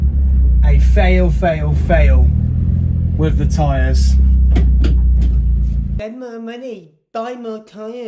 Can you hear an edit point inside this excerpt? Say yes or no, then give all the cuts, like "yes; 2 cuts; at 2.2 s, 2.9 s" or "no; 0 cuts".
yes; 1 cut; at 5.9 s